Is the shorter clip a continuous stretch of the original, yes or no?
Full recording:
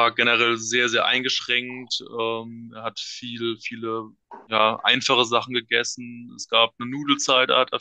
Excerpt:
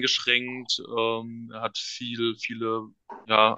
yes